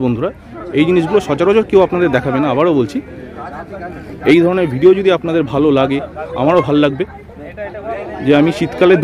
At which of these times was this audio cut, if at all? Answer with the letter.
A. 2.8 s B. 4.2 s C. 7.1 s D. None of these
D